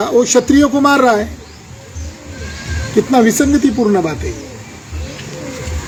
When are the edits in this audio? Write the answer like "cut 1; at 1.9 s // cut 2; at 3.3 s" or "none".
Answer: none